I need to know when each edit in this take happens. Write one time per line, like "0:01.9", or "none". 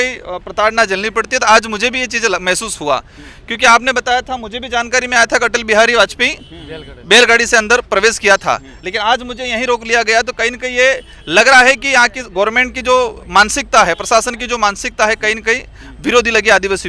none